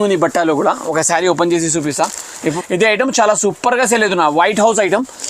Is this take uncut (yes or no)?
no